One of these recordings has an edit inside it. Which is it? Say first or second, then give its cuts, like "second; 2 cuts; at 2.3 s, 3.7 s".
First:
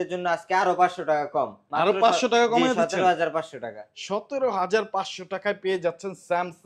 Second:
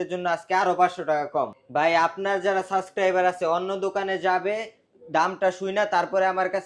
second; 1 cut; at 1.6 s